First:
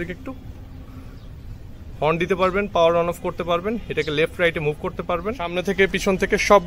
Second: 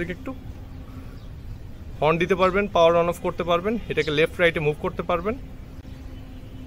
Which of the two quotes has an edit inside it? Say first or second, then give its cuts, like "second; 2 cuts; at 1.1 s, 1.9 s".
first; 1 cut; at 5.6 s